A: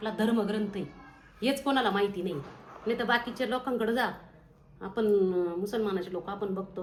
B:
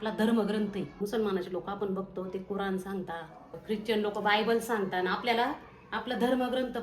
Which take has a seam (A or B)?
B